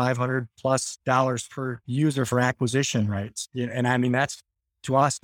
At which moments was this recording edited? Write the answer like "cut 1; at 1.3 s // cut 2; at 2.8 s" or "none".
cut 1; at 0.9 s // cut 2; at 1.8 s